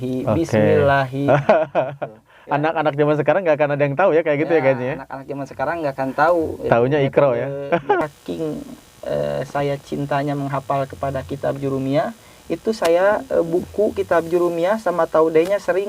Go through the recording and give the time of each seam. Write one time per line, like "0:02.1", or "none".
0:08.0